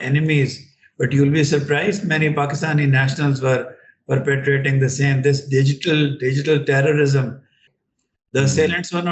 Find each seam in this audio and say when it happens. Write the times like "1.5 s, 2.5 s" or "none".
7.7 s